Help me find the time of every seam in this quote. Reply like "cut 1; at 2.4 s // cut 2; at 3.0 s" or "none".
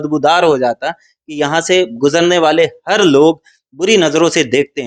none